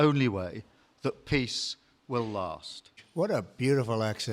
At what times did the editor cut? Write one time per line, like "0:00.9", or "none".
0:03.0